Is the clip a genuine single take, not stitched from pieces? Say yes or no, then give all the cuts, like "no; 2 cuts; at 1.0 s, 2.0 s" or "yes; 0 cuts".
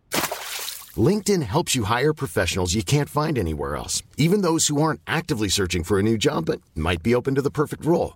yes; 0 cuts